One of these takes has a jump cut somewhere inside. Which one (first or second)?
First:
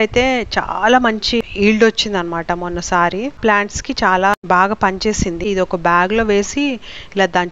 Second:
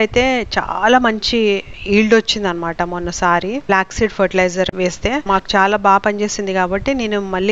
first